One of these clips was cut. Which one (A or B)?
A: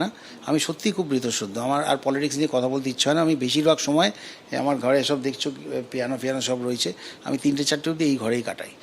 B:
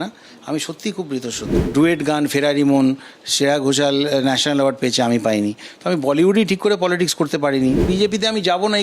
B